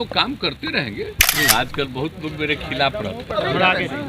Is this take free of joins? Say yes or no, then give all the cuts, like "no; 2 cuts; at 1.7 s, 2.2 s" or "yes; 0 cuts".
no; 1 cut; at 1.2 s